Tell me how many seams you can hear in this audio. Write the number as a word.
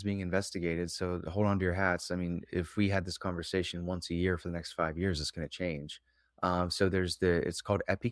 zero